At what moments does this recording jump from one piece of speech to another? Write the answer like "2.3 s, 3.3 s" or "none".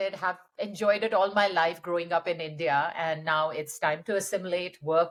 none